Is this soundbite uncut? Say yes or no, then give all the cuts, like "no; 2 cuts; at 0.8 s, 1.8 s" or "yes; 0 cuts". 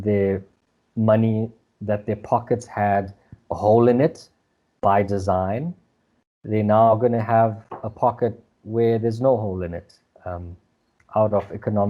yes; 0 cuts